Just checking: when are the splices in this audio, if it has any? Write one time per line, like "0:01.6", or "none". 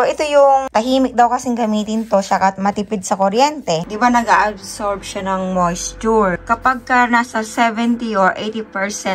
0:03.8